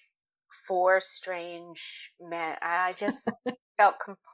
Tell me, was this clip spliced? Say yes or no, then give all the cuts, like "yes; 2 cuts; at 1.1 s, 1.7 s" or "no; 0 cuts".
no; 0 cuts